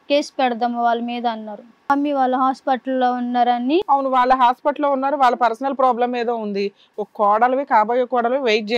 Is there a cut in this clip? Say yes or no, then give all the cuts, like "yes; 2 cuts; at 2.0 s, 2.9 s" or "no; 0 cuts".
yes; 1 cut; at 1.8 s